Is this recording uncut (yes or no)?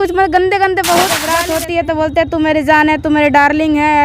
no